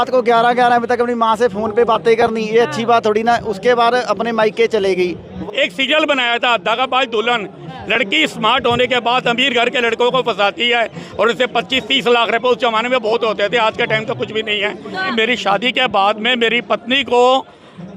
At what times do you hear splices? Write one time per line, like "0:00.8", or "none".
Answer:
0:05.4
0:15.1